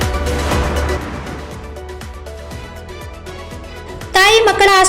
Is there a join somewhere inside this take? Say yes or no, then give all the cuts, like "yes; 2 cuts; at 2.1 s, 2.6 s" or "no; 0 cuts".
no; 0 cuts